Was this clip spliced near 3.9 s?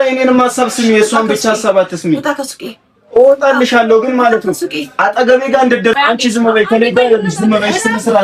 no; 1 cut; at 6.0 s

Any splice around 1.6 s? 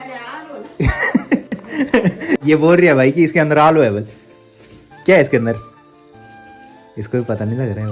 no; 0 cuts

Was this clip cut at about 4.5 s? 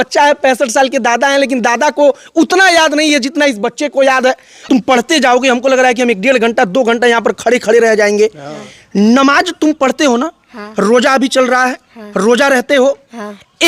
yes; 1 cut; at 4.5 s

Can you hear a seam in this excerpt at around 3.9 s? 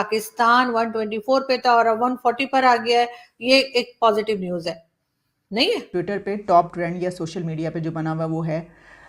no; 1 cut; at 5.9 s

